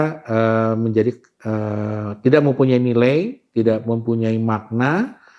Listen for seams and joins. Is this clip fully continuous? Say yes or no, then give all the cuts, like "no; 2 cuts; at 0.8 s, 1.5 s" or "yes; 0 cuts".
yes; 0 cuts